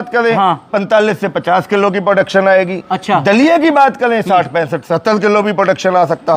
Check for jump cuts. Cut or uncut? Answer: uncut